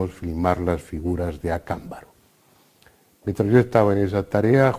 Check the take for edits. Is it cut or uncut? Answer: cut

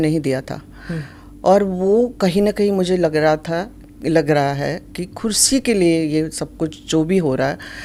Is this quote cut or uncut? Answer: uncut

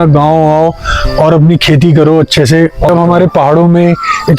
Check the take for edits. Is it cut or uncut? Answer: cut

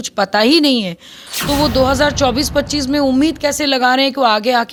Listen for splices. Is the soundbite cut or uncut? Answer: uncut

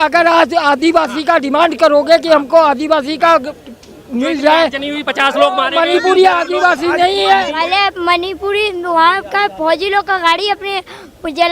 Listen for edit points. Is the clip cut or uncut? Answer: cut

